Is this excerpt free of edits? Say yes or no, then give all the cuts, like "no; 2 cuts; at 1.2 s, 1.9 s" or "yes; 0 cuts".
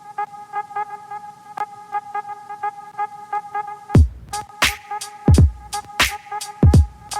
yes; 0 cuts